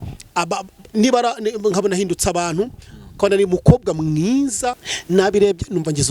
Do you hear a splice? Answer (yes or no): yes